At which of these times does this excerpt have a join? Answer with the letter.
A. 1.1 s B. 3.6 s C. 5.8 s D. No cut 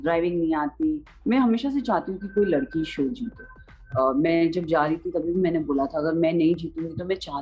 A